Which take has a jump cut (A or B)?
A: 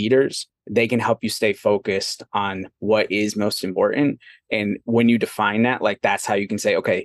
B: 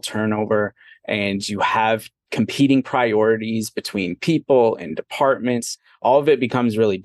B